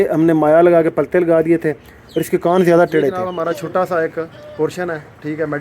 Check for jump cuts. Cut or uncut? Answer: cut